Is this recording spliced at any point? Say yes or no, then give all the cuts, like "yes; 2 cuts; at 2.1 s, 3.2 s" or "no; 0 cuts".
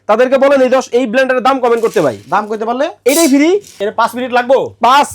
yes; 1 cut; at 3.8 s